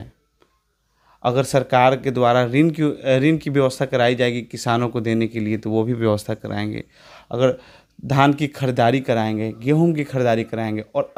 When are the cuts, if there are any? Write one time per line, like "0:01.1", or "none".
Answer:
none